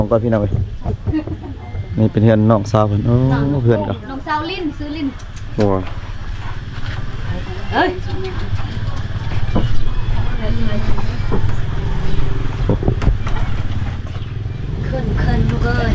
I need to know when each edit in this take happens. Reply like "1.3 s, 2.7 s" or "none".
none

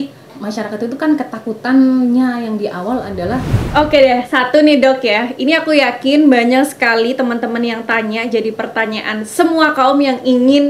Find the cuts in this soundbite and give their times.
3.6 s

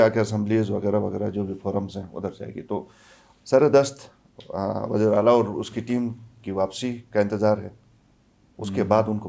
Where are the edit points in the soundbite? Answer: none

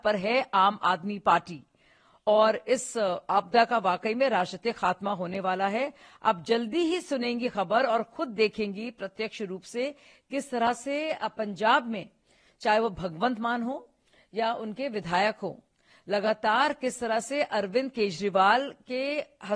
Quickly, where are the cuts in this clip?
none

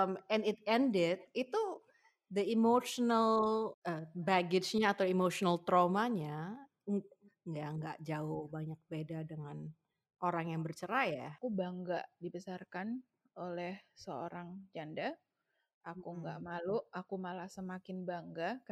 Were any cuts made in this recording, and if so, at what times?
3.7 s, 11.3 s

